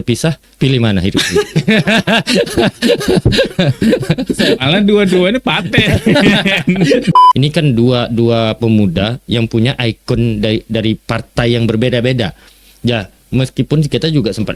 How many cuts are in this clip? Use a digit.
1